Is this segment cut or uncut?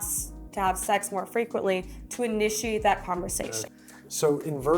cut